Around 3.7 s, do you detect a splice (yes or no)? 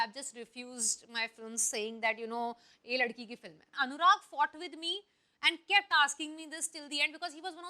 yes